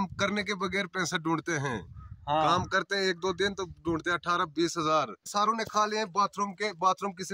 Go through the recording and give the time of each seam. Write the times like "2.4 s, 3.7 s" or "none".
5.3 s